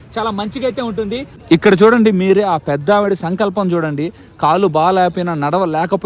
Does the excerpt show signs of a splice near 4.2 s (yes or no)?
no